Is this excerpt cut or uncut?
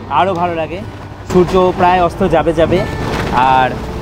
uncut